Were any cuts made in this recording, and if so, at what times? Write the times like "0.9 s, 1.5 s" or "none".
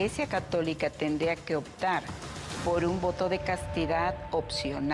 none